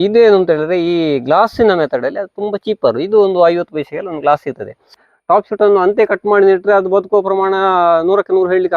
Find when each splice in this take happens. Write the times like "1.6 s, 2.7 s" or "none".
5.0 s